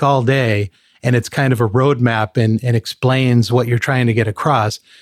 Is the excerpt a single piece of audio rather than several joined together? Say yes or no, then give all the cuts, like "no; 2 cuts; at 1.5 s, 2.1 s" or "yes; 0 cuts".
yes; 0 cuts